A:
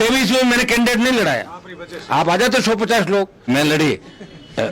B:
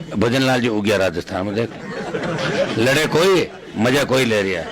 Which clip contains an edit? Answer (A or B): A